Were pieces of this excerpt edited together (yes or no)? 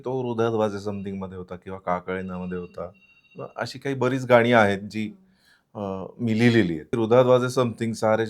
yes